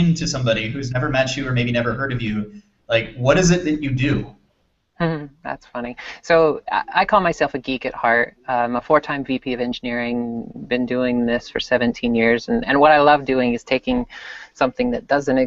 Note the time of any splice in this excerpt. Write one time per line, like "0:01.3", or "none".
0:12.3